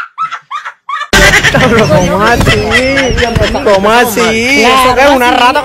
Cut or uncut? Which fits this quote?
cut